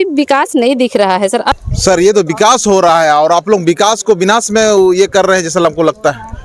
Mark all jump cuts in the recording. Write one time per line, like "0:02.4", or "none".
0:01.5